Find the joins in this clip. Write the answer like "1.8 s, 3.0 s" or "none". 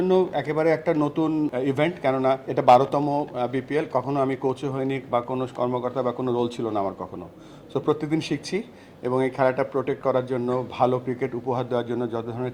1.5 s, 2.5 s

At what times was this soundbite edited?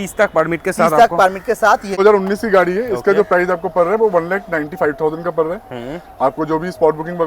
2.0 s

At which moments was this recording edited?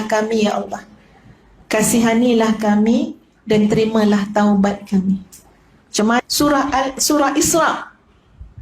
6.2 s

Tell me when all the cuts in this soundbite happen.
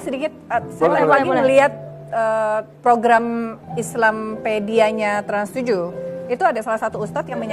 none

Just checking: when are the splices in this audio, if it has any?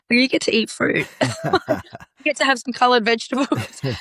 none

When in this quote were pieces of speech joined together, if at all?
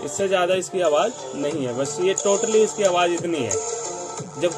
none

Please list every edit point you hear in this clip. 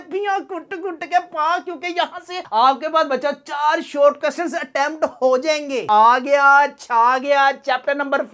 5.8 s

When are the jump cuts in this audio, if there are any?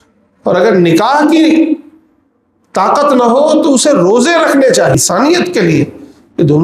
4.9 s

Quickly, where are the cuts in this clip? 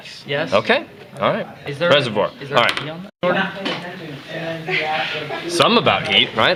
none

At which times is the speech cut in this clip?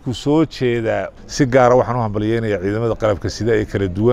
1.1 s

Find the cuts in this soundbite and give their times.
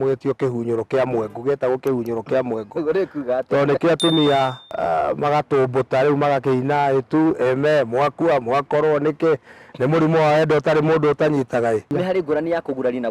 4.6 s, 11.9 s

